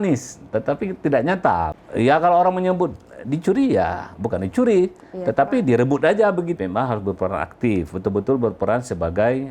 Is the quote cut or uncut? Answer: cut